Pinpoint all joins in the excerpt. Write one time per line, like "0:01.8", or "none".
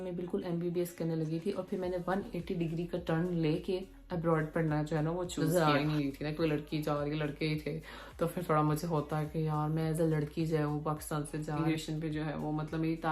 0:05.5
0:11.6